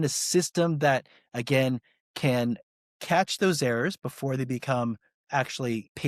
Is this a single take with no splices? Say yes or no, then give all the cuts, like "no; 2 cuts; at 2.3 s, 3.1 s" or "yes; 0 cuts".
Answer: yes; 0 cuts